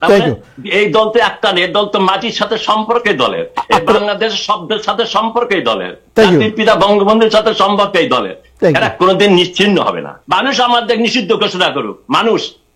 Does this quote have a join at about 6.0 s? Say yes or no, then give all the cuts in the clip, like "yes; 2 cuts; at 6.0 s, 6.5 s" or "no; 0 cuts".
no; 1 cut; at 10.1 s